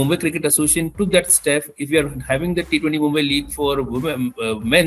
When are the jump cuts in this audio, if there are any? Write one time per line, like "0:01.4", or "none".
none